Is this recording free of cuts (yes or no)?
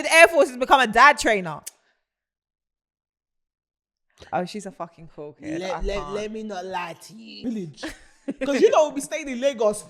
no